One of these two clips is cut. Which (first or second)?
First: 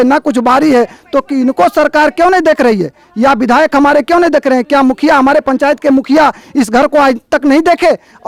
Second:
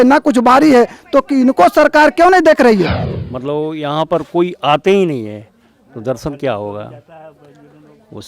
second